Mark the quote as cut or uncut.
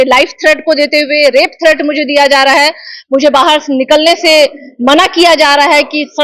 uncut